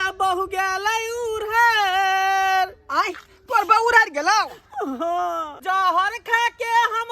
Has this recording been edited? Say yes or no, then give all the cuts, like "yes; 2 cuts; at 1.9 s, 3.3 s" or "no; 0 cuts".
yes; 1 cut; at 5.6 s